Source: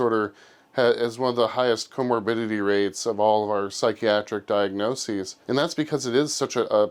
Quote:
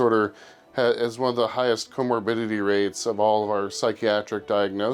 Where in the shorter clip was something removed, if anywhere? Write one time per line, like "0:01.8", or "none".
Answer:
none